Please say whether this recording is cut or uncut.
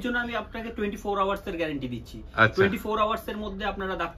uncut